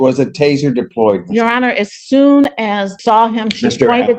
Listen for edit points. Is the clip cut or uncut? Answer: cut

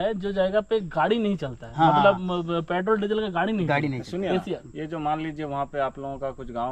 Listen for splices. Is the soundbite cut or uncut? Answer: uncut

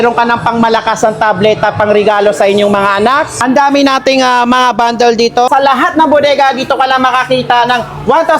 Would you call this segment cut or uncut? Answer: cut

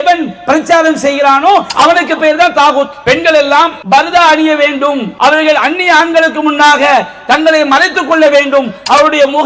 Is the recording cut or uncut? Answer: cut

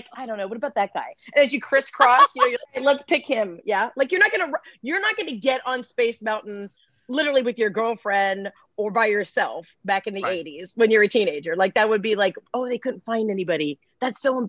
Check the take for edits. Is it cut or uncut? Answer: cut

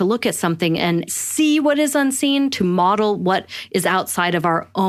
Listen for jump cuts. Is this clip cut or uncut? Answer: cut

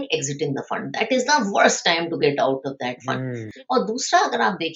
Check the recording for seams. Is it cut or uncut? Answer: cut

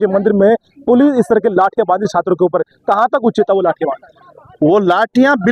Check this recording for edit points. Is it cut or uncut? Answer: uncut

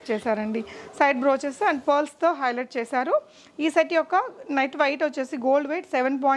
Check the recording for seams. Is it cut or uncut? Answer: uncut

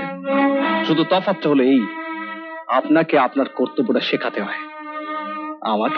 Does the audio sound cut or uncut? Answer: uncut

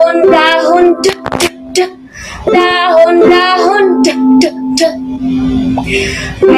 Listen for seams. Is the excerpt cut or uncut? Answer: uncut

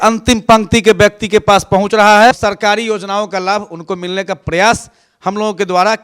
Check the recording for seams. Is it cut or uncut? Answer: cut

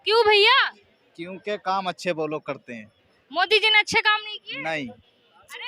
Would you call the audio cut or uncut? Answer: uncut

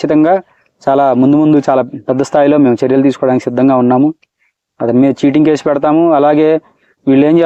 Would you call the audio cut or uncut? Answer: uncut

